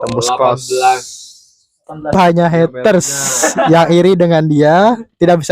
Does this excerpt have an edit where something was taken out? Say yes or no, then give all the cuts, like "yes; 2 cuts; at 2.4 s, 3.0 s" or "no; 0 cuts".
yes; 1 cut; at 2.1 s